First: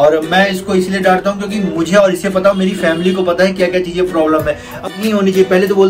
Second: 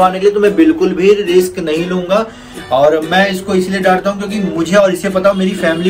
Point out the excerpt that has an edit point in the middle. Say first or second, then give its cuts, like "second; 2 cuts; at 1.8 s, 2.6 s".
first; 1 cut; at 4.9 s